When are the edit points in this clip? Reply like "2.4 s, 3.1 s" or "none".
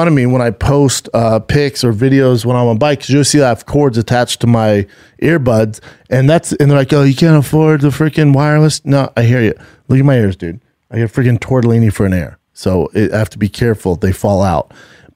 none